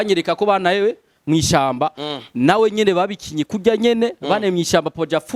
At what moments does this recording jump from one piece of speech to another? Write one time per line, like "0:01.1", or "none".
none